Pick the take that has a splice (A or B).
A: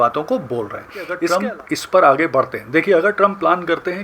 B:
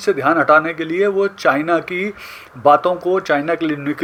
A